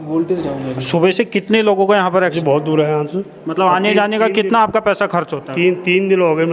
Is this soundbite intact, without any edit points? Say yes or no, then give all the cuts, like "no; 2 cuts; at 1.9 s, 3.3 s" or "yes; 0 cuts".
no; 1 cut; at 2.3 s